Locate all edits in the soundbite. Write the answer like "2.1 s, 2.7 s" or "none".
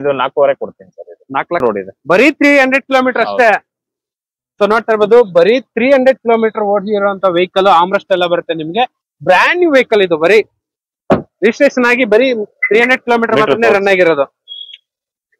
1.6 s